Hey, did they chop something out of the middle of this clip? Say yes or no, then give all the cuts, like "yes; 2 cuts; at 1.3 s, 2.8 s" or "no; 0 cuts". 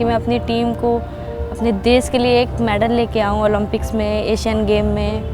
no; 0 cuts